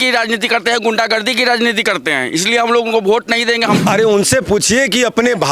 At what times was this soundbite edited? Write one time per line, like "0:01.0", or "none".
0:03.8